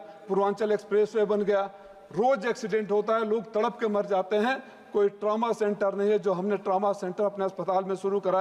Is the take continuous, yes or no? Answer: yes